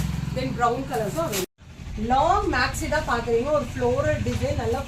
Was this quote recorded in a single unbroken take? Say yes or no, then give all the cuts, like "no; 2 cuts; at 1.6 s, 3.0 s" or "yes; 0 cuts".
no; 1 cut; at 1.5 s